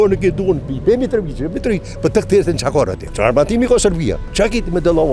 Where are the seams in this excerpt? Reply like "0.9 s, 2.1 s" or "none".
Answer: 3.0 s, 4.2 s